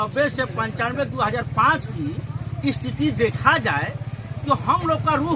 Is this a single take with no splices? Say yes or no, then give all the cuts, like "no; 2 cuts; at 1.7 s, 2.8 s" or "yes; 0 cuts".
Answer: yes; 0 cuts